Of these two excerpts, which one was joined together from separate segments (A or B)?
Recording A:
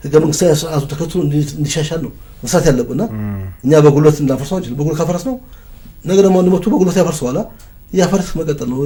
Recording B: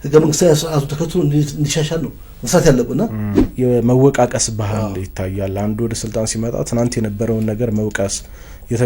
B